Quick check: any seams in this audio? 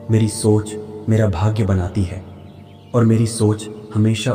no; 0 cuts

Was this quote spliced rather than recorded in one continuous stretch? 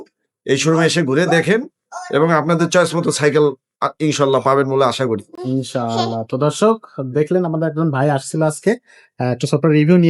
no; 0 cuts

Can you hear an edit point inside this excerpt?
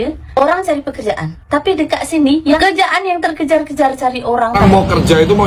yes; 2 cuts; at 2.6 s, 4.6 s

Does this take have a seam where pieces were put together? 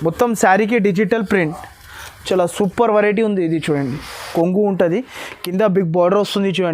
yes; 1 cut; at 4.3 s

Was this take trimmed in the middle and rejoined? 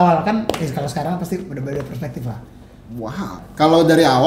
yes; 1 cut; at 3.4 s

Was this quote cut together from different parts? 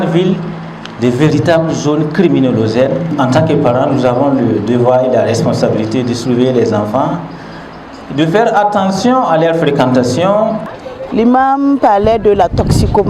yes; 2 cuts; at 3.1 s, 10.8 s

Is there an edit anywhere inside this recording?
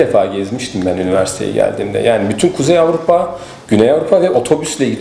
no; 0 cuts

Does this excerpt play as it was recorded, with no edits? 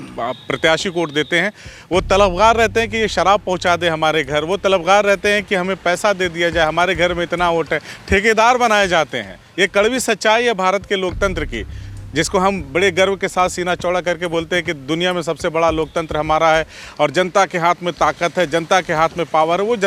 yes; 0 cuts

